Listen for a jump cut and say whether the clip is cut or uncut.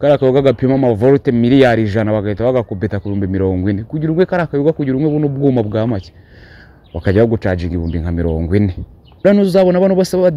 cut